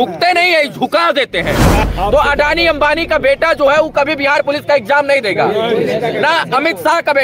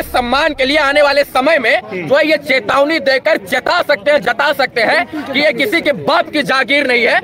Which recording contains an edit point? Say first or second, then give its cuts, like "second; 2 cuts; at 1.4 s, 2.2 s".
first; 1 cut; at 1.8 s